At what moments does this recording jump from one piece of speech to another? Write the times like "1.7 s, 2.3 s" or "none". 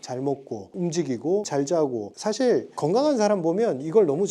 none